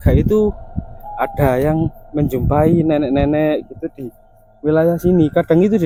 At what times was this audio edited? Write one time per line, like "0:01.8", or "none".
none